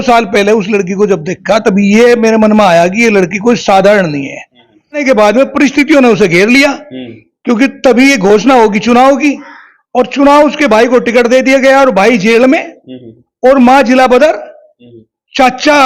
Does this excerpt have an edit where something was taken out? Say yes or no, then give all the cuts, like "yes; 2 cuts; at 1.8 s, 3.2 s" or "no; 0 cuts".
yes; 1 cut; at 5.0 s